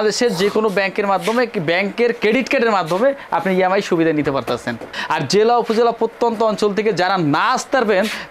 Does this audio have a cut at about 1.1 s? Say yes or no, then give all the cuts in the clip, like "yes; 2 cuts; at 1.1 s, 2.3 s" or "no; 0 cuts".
no; 1 cut; at 4.9 s